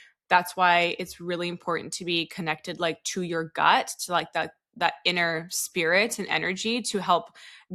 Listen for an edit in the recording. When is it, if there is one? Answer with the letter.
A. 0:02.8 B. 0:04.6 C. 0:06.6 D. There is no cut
D